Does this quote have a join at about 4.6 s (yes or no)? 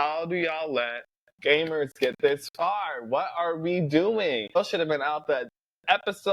yes